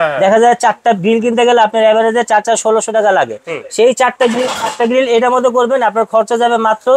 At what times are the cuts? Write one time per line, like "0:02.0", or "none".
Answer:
none